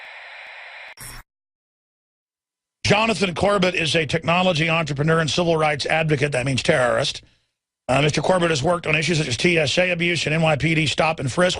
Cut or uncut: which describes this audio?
cut